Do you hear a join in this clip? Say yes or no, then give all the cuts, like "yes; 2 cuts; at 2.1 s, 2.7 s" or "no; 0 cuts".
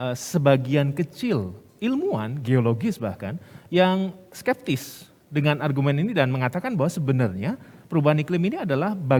no; 0 cuts